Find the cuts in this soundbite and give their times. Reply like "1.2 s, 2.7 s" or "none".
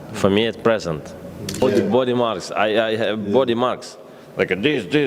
1.6 s